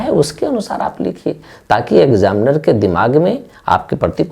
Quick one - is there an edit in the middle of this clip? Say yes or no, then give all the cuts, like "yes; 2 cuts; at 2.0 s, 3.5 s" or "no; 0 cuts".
no; 0 cuts